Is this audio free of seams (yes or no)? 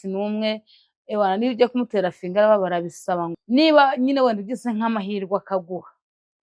no